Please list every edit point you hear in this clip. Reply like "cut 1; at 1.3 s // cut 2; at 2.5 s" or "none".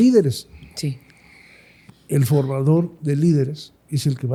none